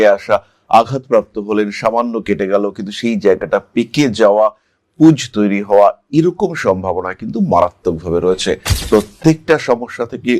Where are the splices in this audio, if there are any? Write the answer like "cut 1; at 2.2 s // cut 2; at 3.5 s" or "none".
cut 1; at 8.7 s